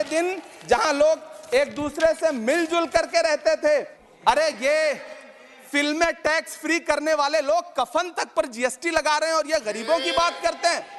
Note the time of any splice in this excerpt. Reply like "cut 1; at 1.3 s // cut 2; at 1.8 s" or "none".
cut 1; at 4.0 s